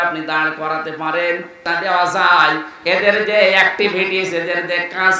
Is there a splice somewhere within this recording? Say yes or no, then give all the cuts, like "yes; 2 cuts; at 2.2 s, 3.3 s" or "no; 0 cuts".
yes; 1 cut; at 1.7 s